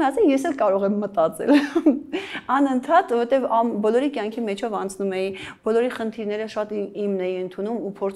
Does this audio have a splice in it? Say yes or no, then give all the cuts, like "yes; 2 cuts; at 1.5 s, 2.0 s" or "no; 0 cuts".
no; 0 cuts